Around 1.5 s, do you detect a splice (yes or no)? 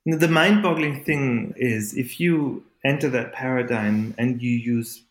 yes